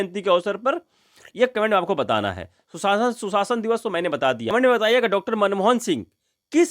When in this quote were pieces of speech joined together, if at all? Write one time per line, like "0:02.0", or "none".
0:04.5